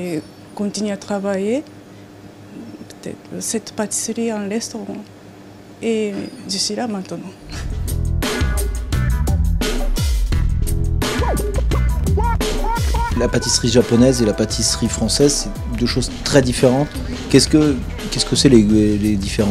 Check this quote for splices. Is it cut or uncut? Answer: cut